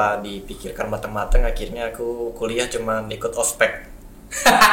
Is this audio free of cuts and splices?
yes; 0 cuts

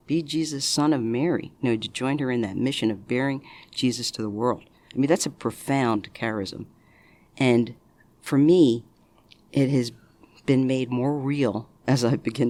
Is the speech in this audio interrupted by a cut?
no; 0 cuts

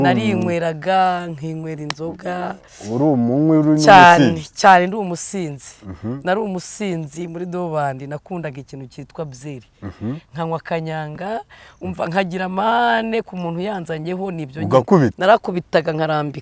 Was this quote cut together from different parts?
no; 0 cuts

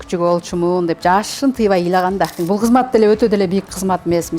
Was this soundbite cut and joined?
yes; 1 cut; at 2.4 s

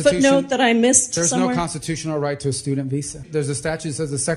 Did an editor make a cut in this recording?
yes; 1 cut; at 3.3 s

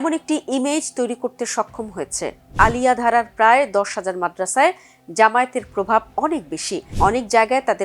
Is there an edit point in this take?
yes; 2 cuts; at 2.5 s, 6.8 s

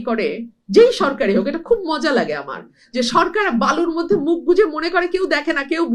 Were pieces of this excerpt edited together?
no; 0 cuts

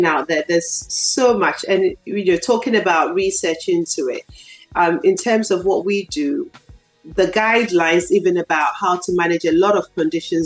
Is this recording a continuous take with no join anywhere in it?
yes; 0 cuts

